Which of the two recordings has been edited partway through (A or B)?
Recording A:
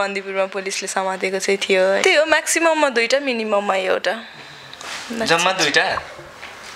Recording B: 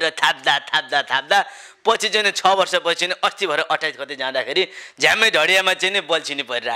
A